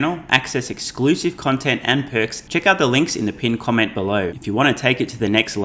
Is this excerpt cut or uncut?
cut